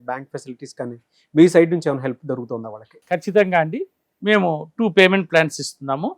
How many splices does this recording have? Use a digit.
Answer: 0